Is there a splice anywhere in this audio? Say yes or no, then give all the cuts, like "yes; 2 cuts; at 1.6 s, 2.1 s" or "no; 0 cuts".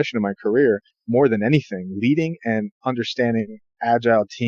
yes; 1 cut; at 0.9 s